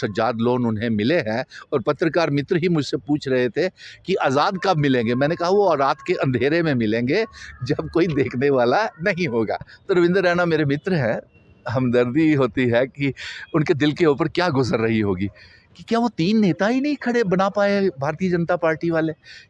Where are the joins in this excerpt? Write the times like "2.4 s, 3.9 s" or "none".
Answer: 9.7 s